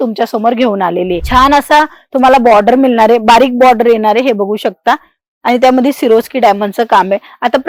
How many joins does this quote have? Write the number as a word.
one